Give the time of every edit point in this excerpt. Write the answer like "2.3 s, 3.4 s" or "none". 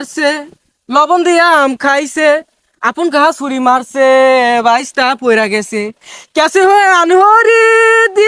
none